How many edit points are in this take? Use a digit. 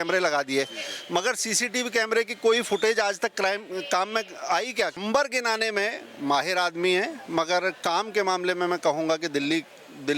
1